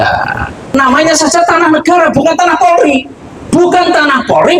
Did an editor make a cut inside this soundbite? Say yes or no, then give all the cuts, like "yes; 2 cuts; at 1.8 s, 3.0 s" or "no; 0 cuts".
yes; 2 cuts; at 0.7 s, 3.5 s